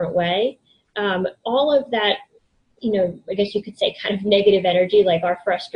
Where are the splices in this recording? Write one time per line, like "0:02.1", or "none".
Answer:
none